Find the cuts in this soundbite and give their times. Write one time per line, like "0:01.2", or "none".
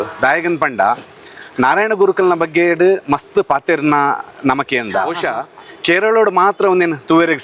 0:05.2